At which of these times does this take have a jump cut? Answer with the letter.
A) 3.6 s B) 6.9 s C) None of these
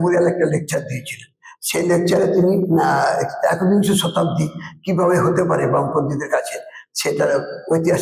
C